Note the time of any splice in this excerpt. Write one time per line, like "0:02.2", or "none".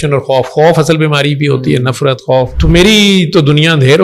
0:02.5